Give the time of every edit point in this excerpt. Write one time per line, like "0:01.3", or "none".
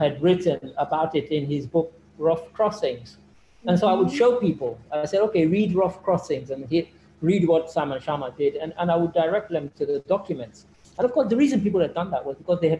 none